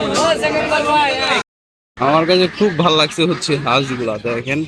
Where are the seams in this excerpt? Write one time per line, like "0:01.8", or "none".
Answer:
0:01.4